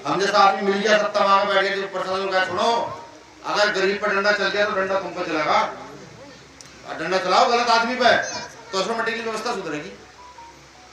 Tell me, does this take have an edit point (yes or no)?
no